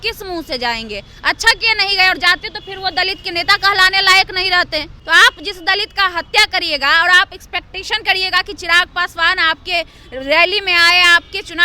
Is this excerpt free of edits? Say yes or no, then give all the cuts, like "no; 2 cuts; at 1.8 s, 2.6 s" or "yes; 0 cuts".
no; 1 cut; at 5.0 s